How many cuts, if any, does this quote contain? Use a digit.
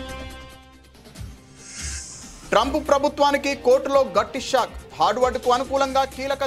1